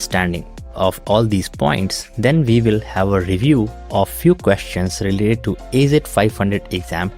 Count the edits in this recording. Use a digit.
0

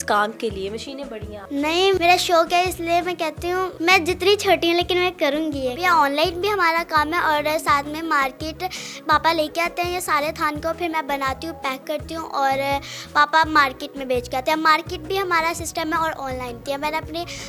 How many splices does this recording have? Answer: 5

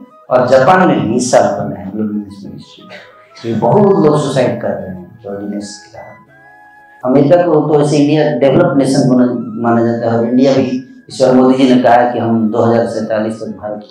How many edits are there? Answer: 1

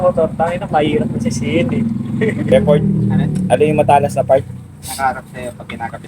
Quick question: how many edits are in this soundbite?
1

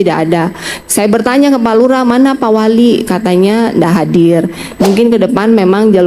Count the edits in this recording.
1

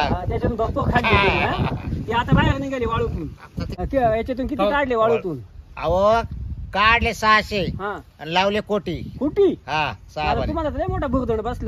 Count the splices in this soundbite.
1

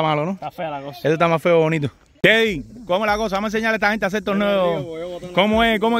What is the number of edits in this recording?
1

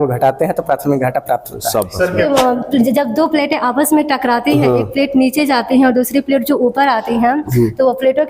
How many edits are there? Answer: 1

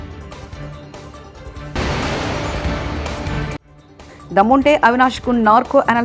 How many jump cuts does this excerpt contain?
0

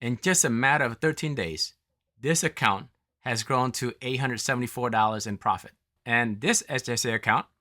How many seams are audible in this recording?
1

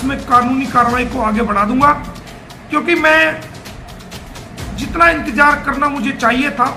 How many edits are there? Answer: 0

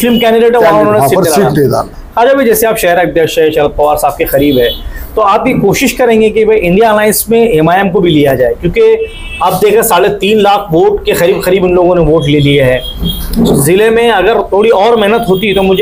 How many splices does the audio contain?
0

